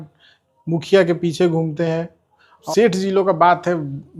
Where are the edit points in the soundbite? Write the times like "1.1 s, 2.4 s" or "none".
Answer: 2.7 s